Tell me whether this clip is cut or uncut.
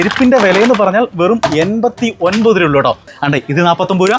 cut